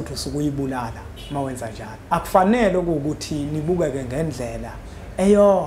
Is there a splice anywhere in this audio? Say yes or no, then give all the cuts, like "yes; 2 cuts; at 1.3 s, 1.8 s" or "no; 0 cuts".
yes; 1 cut; at 1.9 s